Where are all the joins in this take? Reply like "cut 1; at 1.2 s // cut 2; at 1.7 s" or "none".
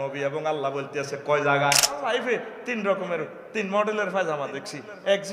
cut 1; at 2.0 s